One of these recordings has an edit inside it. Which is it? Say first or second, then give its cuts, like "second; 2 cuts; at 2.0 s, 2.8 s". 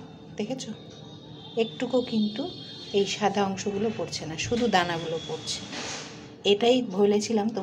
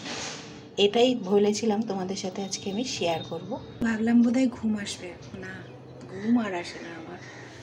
second; 1 cut; at 3.8 s